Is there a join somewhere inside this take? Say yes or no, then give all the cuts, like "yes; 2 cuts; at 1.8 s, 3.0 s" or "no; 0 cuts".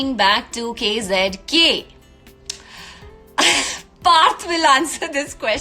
no; 0 cuts